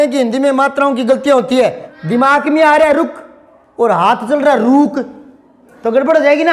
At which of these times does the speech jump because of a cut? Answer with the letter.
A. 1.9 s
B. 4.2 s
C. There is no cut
A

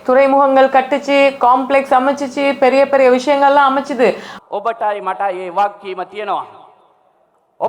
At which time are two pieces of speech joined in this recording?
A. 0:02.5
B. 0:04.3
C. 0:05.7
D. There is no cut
B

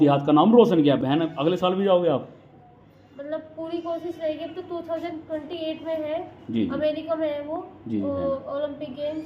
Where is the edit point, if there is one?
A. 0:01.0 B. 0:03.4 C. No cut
A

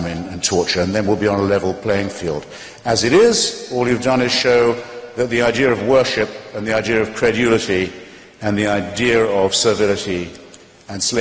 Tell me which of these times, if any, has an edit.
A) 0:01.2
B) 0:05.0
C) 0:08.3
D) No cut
D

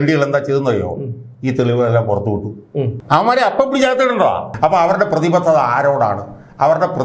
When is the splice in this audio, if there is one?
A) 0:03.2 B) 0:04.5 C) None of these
B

